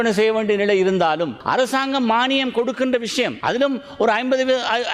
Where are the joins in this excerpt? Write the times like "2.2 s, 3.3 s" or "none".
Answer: 1.4 s, 3.4 s